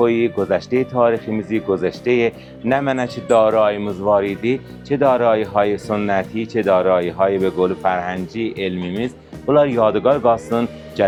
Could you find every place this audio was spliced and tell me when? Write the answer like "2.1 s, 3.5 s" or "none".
none